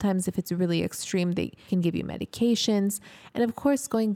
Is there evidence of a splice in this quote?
yes; 1 cut; at 1.6 s

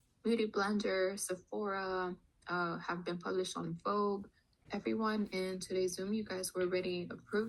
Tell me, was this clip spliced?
yes; 1 cut; at 4.5 s

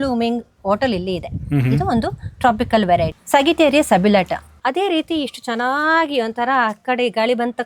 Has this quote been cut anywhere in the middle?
yes; 2 cuts; at 3.2 s, 4.6 s

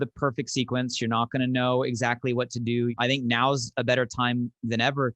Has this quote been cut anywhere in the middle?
yes; 1 cut; at 2.9 s

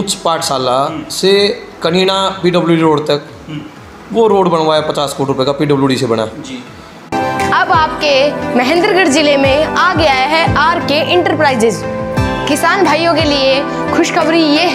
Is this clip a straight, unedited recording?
no; 1 cut; at 7.1 s

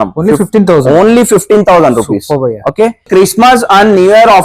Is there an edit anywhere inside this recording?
yes; 1 cut; at 3.1 s

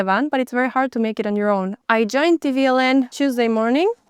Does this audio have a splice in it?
yes; 2 cuts; at 1.8 s, 3.1 s

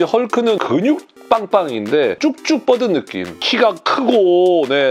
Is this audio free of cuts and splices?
yes; 0 cuts

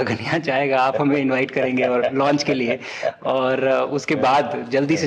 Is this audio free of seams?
yes; 0 cuts

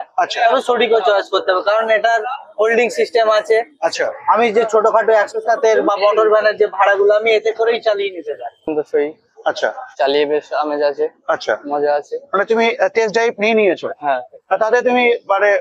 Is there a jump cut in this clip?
yes; 1 cut; at 8.6 s

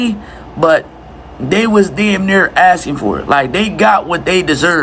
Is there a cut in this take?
no; 0 cuts

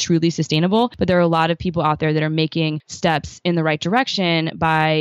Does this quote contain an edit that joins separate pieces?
yes; 2 cuts; at 1.0 s, 2.9 s

